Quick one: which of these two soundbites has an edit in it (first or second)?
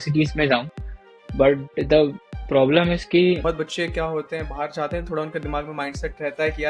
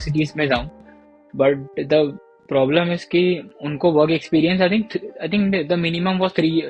first